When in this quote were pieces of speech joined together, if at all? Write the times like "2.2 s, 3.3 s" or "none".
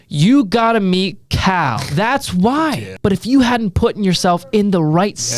1.8 s, 2.9 s

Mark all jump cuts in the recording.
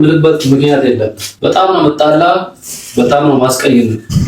1.2 s

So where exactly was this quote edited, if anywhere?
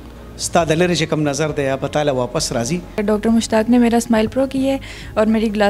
3.0 s

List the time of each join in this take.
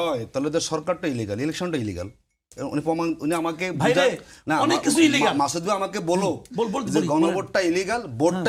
none

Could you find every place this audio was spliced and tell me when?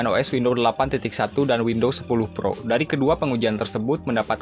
none

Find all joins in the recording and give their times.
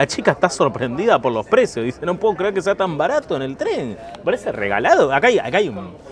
none

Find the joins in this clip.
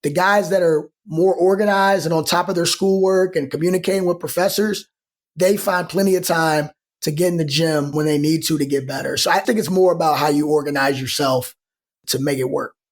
7.9 s, 9.4 s, 12.0 s

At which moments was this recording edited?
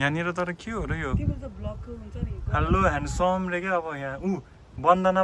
none

